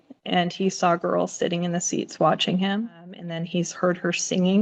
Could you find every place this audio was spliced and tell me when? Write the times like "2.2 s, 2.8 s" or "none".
3.4 s